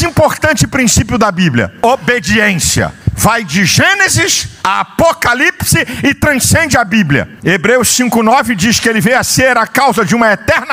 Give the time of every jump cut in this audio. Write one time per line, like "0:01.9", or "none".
none